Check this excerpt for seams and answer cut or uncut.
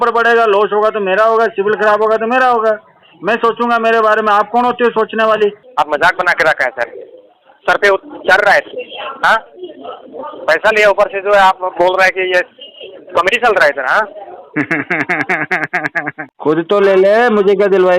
cut